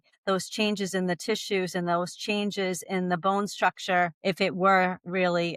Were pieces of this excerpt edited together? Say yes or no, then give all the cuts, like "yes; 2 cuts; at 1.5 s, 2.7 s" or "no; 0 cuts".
no; 0 cuts